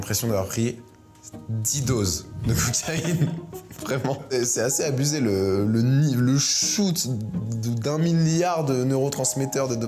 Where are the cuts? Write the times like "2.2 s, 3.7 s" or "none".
none